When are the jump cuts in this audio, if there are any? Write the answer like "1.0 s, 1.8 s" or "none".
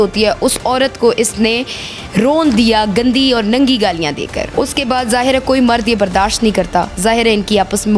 none